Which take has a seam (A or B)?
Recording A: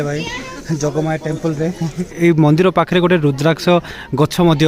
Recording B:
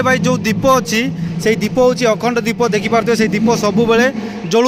A